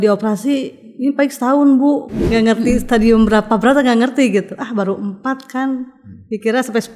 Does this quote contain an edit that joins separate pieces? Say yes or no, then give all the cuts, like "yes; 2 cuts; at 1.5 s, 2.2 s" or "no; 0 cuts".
yes; 1 cut; at 2.1 s